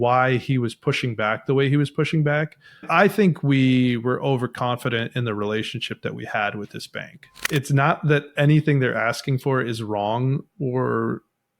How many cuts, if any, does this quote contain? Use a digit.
2